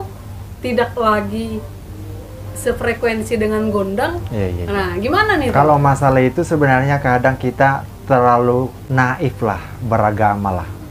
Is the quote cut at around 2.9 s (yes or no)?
no